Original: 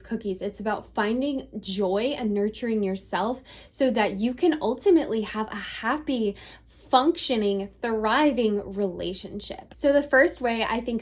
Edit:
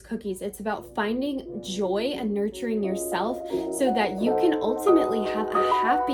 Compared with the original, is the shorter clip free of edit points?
yes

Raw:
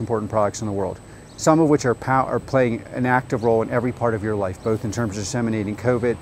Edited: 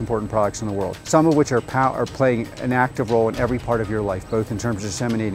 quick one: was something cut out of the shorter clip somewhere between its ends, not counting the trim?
yes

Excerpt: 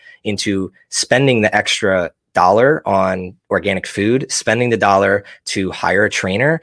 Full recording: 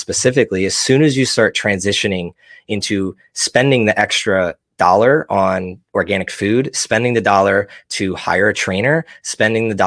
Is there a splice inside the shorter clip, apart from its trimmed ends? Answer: no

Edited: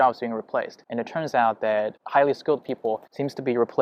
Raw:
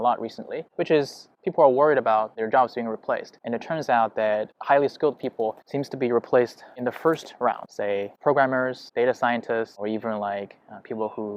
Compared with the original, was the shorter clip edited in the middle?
no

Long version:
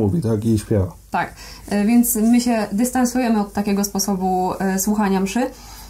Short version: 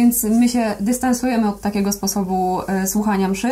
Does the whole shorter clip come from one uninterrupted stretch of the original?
yes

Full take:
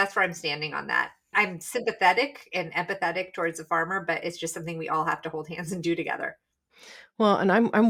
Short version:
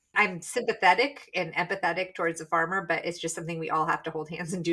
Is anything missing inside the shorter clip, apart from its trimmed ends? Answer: no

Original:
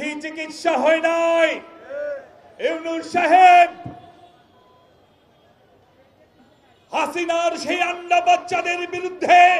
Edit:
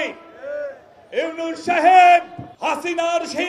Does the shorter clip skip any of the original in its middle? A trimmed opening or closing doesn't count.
yes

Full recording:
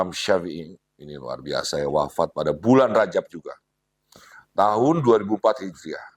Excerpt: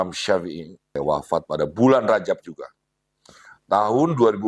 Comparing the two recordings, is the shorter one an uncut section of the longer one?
no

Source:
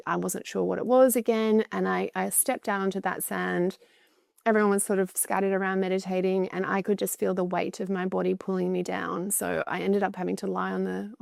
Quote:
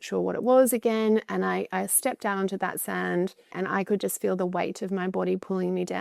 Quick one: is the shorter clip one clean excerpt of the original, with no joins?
no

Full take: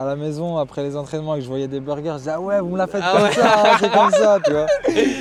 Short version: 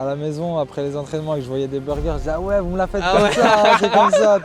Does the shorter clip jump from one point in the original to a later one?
no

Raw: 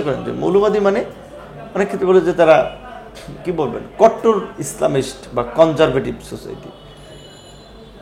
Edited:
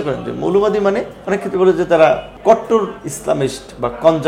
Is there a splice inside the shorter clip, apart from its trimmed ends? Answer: yes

